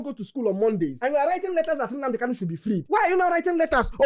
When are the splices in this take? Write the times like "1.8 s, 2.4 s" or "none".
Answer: none

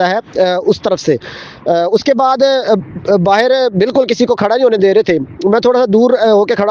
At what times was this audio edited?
none

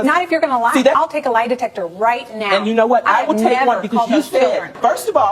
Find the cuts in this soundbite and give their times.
0.9 s

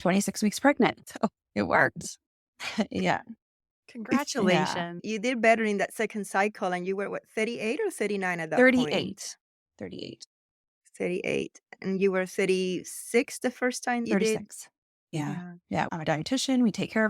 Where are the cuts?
14.1 s, 15.9 s

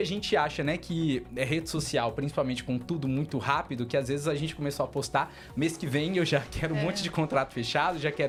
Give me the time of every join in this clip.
none

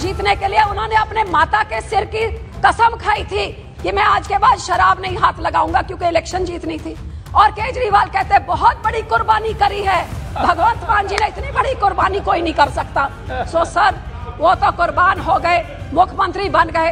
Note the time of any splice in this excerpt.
none

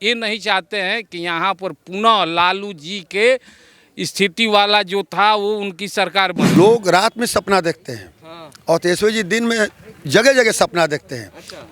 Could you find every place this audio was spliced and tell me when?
6.4 s

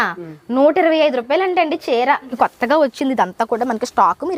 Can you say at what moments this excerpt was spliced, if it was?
2.3 s

